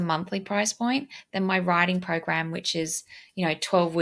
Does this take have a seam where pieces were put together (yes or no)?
no